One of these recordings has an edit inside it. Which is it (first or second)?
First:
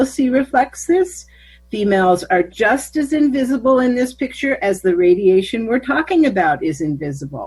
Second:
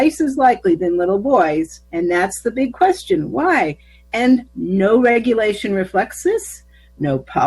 second